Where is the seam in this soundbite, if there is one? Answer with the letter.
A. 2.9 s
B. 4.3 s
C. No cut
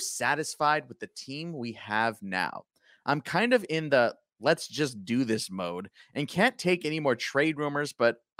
C